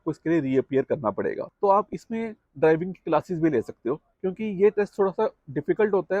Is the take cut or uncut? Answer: cut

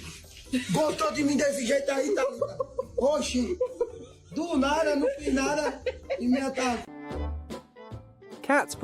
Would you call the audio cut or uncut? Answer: cut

